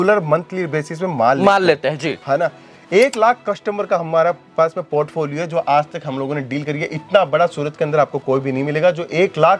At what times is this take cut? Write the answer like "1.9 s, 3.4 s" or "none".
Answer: none